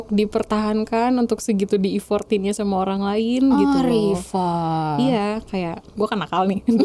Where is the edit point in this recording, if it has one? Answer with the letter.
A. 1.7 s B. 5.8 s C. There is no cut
B